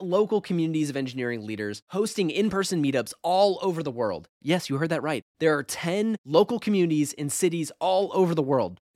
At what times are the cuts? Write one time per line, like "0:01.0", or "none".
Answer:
none